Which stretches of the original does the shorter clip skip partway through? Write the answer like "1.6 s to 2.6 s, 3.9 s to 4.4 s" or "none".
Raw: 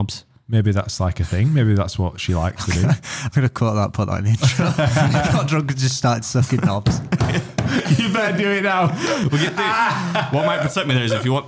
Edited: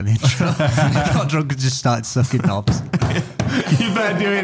none